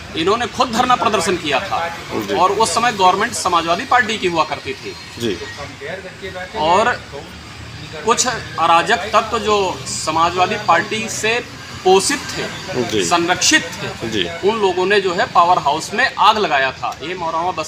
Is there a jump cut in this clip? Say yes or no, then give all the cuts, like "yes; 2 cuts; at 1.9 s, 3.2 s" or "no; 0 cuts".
no; 0 cuts